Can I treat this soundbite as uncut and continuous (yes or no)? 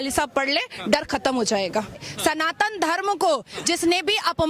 no